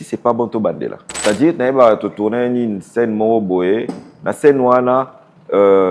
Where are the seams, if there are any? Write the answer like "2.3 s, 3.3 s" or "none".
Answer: 1.1 s